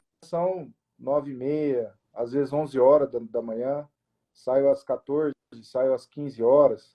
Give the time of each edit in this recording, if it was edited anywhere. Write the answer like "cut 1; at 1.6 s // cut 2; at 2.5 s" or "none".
none